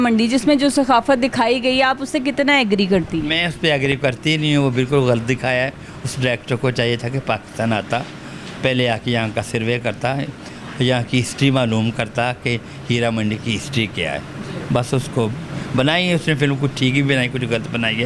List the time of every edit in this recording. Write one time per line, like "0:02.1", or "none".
none